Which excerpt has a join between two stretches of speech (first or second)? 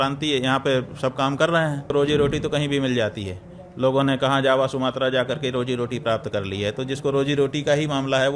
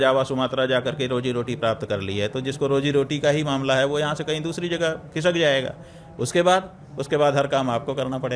first